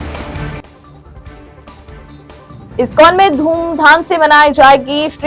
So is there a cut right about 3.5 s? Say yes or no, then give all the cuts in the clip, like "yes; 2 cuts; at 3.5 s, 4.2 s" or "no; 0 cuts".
no; 1 cut; at 2.2 s